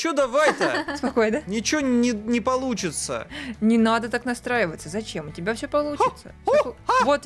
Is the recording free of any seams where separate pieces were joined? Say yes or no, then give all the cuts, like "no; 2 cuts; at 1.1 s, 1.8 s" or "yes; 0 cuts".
yes; 0 cuts